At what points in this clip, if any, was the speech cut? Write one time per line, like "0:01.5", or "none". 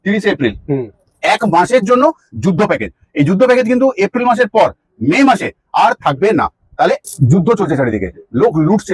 0:07.1

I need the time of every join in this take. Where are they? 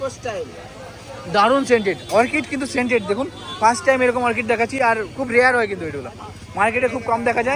none

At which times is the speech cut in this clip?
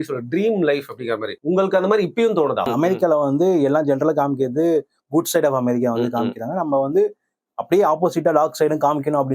0:01.3
0:02.7

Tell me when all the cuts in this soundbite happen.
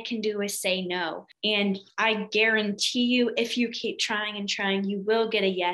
0:01.3

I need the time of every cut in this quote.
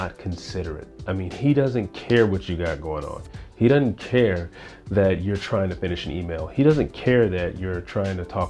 none

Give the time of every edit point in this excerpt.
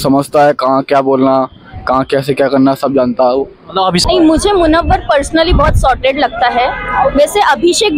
0:04.0

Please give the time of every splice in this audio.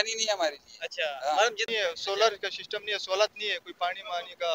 0:01.6

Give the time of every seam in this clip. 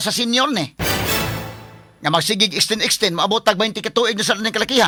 none

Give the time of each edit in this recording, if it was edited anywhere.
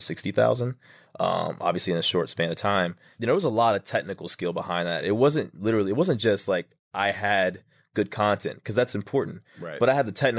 0:03.1

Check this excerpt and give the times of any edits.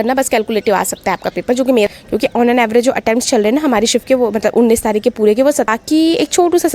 0:01.9
0:05.7

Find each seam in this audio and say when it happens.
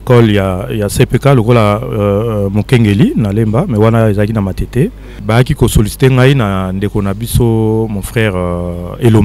0:05.1

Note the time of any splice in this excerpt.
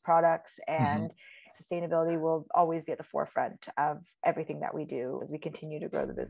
0:01.5
0:05.2

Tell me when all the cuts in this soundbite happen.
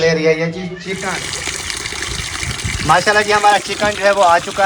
0:01.0

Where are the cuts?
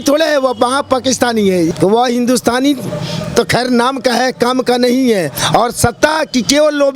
0:01.7

